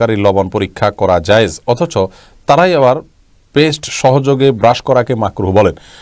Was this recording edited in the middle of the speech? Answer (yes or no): no